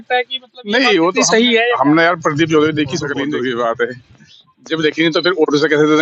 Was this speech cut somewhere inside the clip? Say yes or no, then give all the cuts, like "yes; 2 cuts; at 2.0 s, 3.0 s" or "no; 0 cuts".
yes; 1 cut; at 3.2 s